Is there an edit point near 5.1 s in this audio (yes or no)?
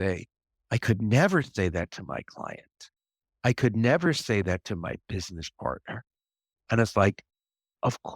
no